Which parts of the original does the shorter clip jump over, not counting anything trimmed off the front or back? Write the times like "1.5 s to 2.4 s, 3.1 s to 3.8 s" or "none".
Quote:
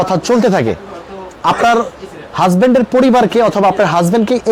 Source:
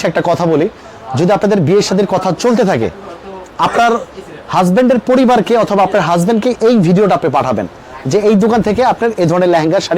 none

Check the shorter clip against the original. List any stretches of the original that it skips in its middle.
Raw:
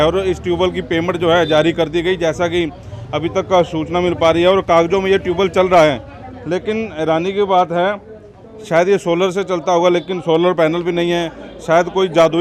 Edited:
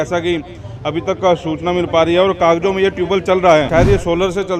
6.0 s to 8.7 s

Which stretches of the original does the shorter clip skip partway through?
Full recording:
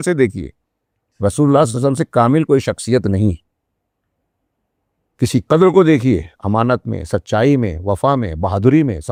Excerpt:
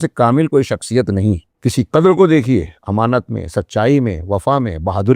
3.5 s to 5.1 s

